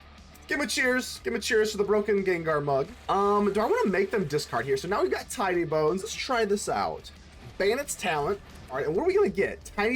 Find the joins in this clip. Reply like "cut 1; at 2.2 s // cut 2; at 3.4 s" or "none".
cut 1; at 3.0 s // cut 2; at 6.1 s // cut 3; at 8.8 s